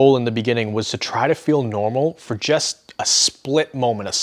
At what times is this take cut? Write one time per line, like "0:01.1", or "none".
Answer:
none